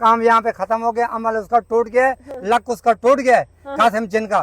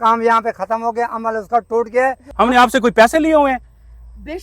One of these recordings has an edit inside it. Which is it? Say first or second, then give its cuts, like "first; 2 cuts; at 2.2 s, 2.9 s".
second; 1 cut; at 2.2 s